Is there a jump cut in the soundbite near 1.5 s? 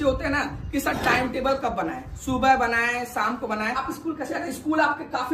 no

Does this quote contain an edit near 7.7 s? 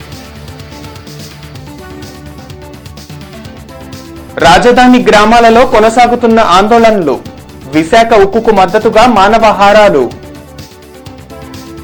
no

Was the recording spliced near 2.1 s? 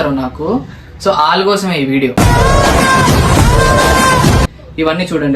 no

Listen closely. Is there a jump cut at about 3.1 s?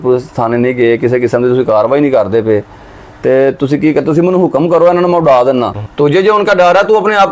no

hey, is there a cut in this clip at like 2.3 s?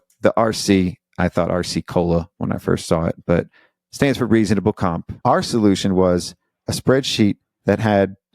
no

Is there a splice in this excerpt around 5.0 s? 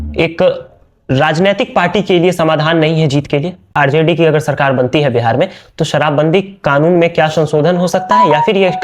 no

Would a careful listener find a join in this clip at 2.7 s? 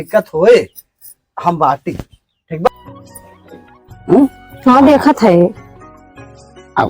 yes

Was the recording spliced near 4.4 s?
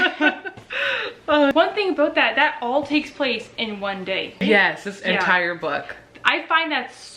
yes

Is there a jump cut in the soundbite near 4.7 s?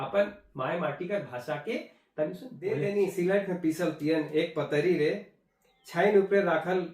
no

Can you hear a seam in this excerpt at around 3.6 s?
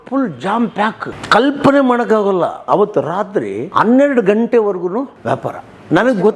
yes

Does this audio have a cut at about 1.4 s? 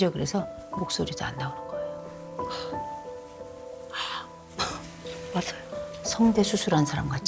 no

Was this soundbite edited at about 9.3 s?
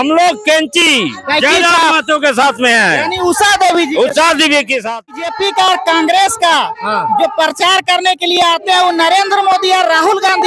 no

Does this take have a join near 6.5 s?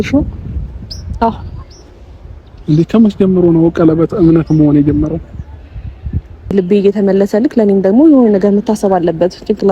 yes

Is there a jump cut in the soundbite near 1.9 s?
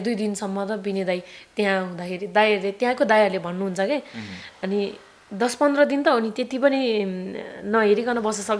no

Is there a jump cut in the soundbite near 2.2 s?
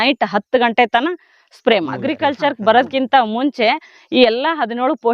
yes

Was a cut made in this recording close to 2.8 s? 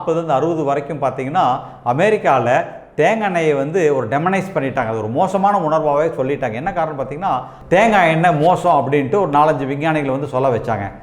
no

